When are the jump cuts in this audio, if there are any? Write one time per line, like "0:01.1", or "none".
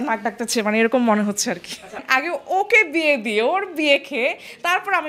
0:02.0